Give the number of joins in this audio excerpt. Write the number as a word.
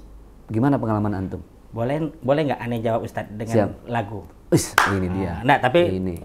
zero